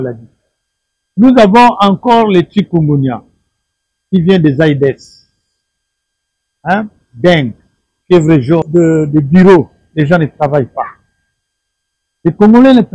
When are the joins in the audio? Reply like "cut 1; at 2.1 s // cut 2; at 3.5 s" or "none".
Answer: cut 1; at 8.7 s